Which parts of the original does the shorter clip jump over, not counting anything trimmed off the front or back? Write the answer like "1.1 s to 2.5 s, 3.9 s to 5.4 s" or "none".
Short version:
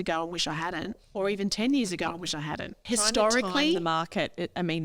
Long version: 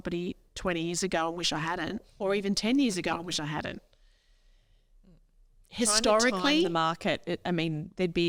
3.8 s to 5.6 s